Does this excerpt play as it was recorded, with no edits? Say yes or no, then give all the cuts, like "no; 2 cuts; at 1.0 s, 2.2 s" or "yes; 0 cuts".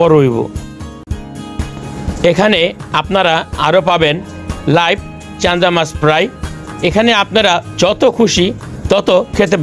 no; 1 cut; at 1.0 s